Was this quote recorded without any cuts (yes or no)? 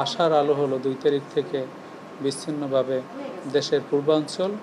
yes